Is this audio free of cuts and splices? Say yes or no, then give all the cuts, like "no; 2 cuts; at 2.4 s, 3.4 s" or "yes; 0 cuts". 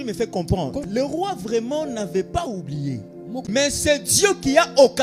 no; 2 cuts; at 0.8 s, 3.4 s